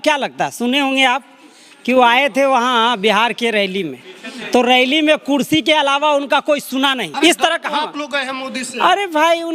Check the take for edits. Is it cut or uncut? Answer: cut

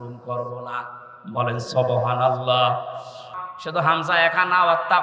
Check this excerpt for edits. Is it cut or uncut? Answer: cut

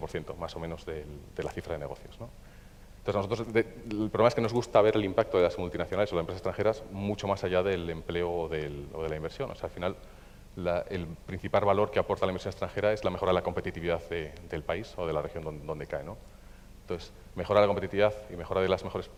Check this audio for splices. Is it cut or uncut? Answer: uncut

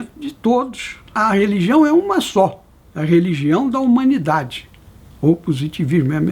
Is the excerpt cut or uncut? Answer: cut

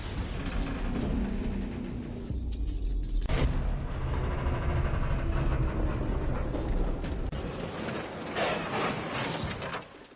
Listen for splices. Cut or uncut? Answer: uncut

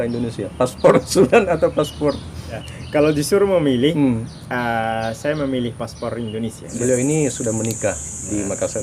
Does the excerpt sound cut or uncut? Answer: cut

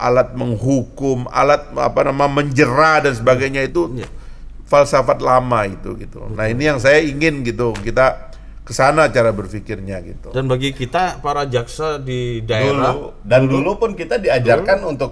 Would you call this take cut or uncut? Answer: uncut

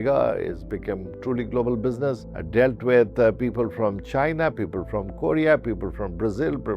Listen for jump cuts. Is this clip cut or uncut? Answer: cut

